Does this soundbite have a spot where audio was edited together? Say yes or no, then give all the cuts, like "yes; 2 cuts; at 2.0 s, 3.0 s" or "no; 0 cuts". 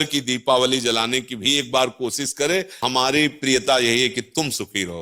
yes; 1 cut; at 2.8 s